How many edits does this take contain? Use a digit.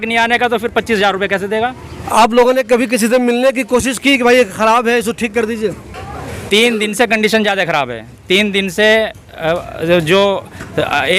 0